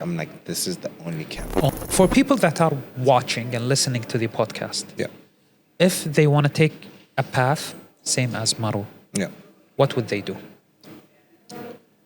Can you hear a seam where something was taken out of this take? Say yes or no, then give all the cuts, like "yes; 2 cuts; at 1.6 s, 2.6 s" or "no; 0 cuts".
yes; 1 cut; at 1.7 s